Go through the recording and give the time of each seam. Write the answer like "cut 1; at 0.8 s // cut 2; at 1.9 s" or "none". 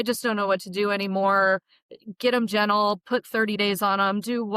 none